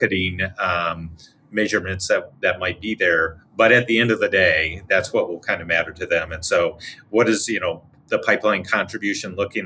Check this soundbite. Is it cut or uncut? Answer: uncut